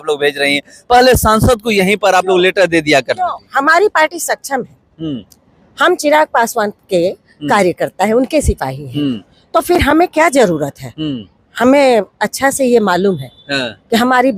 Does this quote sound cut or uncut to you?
uncut